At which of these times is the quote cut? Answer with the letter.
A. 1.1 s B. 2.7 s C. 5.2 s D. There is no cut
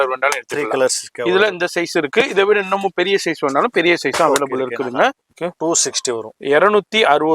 C